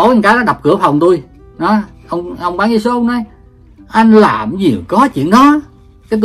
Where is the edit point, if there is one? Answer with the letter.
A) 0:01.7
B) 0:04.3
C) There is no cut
A